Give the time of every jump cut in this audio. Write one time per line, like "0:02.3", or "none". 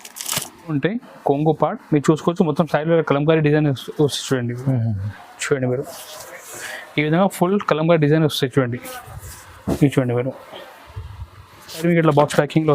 0:00.7
0:11.8